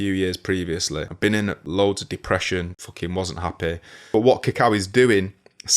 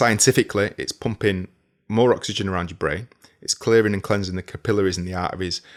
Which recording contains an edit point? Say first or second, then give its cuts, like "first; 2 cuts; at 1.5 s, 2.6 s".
first; 3 cuts; at 1.2 s, 2.8 s, 3.9 s